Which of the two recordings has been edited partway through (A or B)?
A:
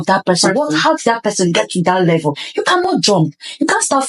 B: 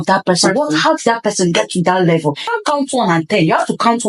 B